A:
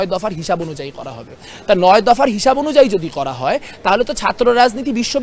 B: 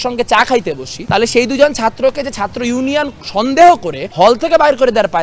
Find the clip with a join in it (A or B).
B